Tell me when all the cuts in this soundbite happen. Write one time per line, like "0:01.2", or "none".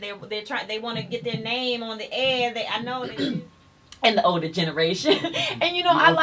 0:03.0